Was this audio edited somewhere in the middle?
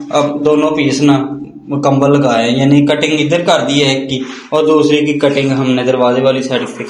no; 0 cuts

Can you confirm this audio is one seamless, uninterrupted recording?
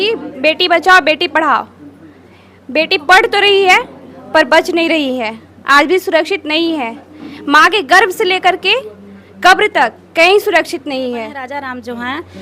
no; 1 cut; at 11.4 s

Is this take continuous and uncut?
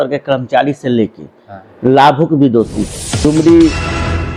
no; 1 cut; at 3.2 s

